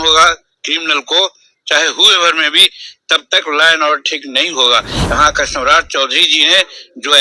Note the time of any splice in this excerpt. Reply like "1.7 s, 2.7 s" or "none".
4.9 s